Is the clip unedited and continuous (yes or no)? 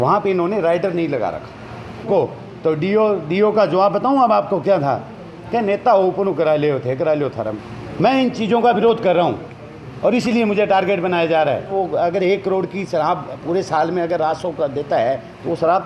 no